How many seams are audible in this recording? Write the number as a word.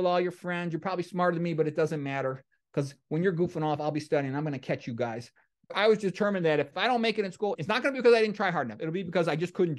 three